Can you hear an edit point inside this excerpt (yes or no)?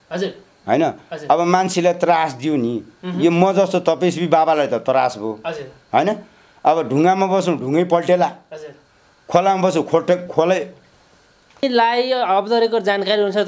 no